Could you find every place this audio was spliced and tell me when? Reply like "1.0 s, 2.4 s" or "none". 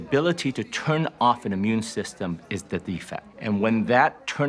3.3 s